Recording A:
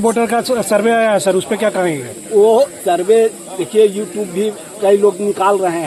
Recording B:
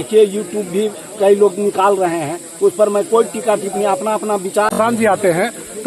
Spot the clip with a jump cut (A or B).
B